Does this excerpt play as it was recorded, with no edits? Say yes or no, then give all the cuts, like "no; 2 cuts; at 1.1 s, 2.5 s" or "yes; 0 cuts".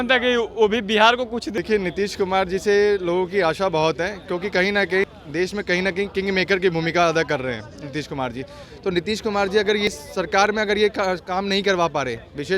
no; 3 cuts; at 1.5 s, 5.0 s, 9.9 s